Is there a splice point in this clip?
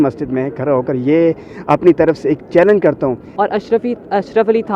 yes; 1 cut; at 3.2 s

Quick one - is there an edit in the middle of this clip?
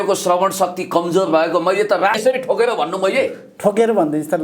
yes; 1 cut; at 2.2 s

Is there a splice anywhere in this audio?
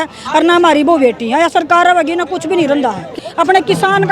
yes; 1 cut; at 3.2 s

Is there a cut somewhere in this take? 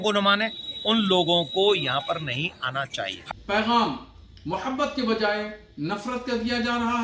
yes; 1 cut; at 3.2 s

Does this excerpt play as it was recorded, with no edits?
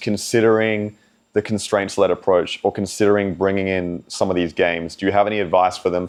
yes; 0 cuts

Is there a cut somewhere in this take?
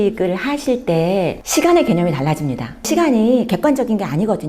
yes; 1 cut; at 1.3 s

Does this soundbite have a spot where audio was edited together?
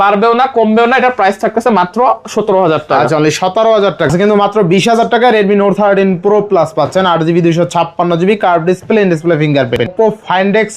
yes; 2 cuts; at 4.1 s, 9.9 s

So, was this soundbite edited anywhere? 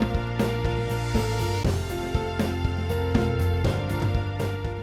no; 0 cuts

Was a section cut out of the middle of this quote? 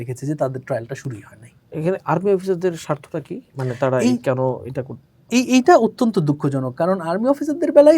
no; 0 cuts

